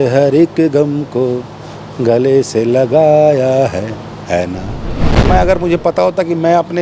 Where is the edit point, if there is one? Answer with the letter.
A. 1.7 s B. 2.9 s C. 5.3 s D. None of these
C